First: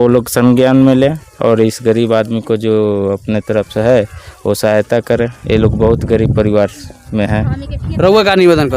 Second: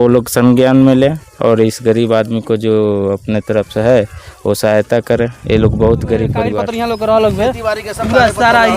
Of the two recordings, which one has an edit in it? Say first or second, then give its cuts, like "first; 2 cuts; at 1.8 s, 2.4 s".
second; 1 cut; at 6.6 s